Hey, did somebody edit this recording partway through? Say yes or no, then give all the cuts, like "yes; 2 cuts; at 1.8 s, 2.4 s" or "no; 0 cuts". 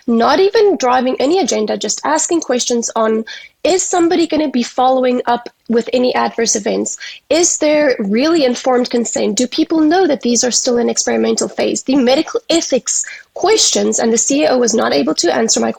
no; 0 cuts